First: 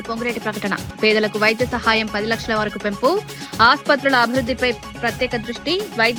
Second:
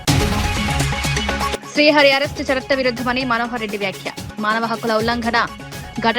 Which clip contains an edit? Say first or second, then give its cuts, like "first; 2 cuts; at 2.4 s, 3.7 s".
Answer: second; 1 cut; at 1.5 s